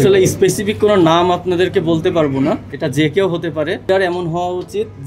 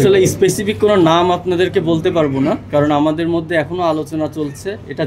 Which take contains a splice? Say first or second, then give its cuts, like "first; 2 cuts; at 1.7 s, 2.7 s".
first; 2 cuts; at 2.6 s, 3.9 s